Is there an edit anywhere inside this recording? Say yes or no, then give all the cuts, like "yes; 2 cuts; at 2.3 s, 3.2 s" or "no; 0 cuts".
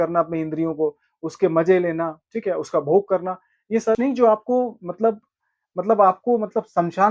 yes; 1 cut; at 4.0 s